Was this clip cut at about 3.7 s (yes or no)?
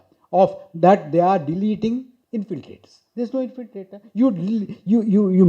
no